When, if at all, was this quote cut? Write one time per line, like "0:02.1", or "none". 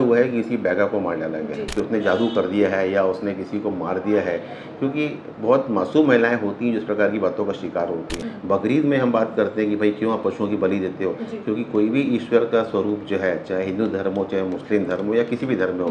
0:01.6
0:08.2